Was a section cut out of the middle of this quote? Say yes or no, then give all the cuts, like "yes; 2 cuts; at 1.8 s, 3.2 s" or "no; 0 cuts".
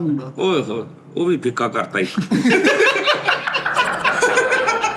no; 0 cuts